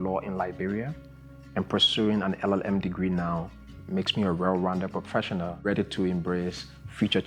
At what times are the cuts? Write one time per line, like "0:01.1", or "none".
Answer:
0:05.5